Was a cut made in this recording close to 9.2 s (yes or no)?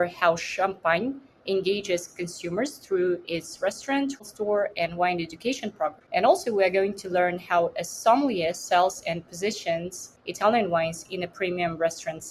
no